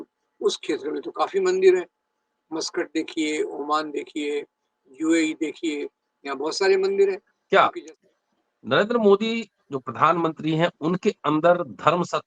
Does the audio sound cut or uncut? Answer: cut